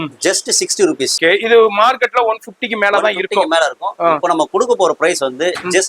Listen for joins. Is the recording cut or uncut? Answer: cut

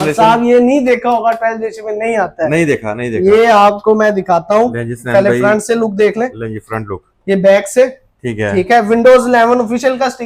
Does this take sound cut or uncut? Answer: uncut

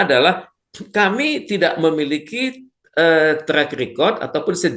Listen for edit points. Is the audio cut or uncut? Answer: uncut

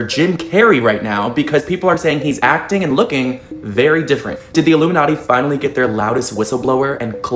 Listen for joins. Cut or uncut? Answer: uncut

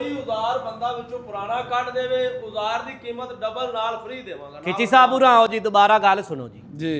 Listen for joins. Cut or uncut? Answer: uncut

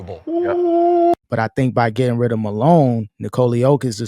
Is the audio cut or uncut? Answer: cut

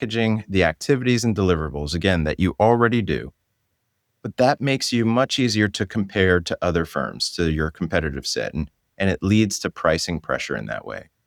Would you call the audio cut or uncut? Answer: uncut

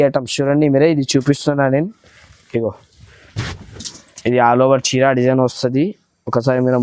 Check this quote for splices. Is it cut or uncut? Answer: uncut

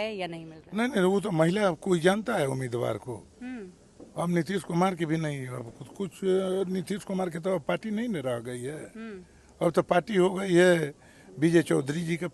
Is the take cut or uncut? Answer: uncut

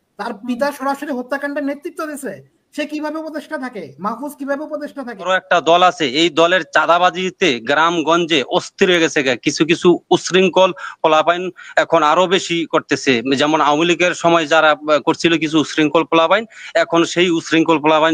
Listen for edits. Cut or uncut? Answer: cut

